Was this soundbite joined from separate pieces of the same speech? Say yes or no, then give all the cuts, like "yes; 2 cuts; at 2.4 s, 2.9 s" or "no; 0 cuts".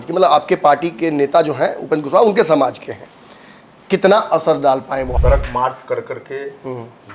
yes; 1 cut; at 5.1 s